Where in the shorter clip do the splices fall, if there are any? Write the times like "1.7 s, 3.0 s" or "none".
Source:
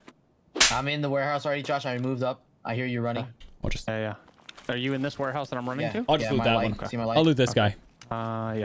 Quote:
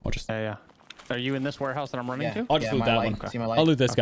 none